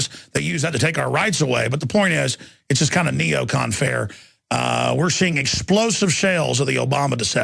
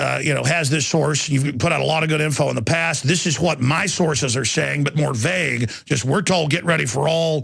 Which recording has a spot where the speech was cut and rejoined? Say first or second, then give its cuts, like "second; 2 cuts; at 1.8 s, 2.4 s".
first; 1 cut; at 3.6 s